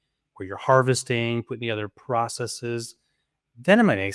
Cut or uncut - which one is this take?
uncut